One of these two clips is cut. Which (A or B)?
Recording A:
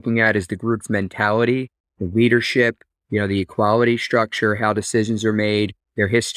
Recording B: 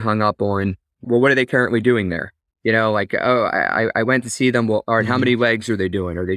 B